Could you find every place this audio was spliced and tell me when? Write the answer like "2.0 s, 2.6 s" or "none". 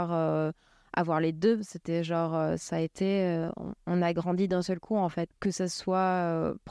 5.3 s